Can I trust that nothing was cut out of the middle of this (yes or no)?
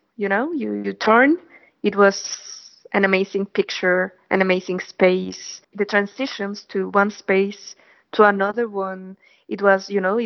no